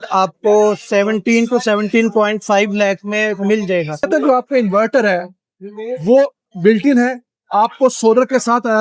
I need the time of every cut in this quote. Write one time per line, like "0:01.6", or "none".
0:04.1